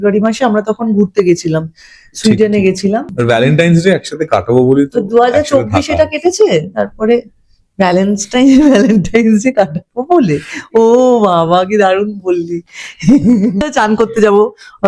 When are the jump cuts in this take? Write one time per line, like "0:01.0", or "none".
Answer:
0:03.1
0:13.6